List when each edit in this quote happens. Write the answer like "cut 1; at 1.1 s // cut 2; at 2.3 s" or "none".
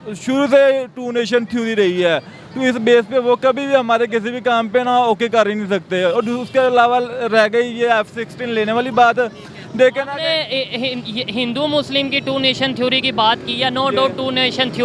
none